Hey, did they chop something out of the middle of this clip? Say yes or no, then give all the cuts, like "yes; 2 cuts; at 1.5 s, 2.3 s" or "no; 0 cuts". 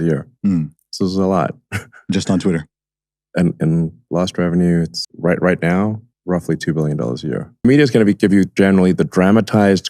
no; 0 cuts